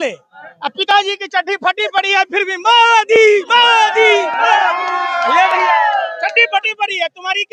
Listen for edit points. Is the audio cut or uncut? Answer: uncut